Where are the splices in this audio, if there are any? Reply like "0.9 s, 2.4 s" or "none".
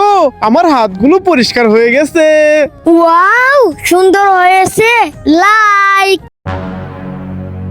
6.4 s